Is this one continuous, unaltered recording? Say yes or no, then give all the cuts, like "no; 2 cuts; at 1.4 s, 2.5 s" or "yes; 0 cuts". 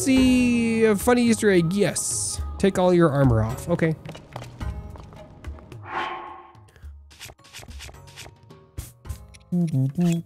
yes; 0 cuts